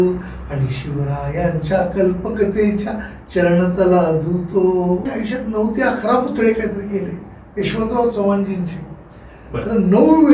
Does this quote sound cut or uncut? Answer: cut